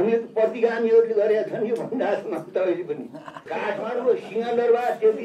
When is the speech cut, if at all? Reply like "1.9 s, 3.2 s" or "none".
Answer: 3.4 s